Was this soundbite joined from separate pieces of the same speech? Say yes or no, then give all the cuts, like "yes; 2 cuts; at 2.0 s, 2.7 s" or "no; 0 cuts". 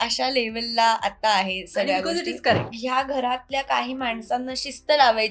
yes; 1 cut; at 2.7 s